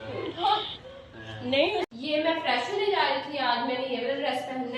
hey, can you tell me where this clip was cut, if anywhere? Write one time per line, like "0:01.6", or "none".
0:01.8